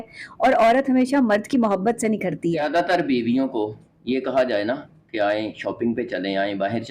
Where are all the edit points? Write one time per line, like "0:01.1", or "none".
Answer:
0:02.6